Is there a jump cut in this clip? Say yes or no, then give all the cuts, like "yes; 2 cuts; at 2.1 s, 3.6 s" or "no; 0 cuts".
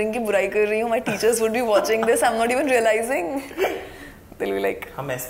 no; 0 cuts